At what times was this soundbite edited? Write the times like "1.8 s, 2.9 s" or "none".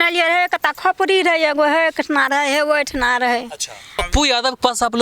4.0 s